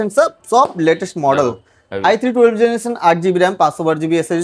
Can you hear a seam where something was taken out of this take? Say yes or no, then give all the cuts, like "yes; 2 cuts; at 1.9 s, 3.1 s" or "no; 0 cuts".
no; 0 cuts